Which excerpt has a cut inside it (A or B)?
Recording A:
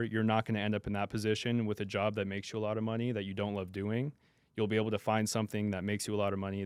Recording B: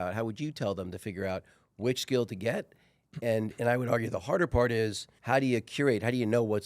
B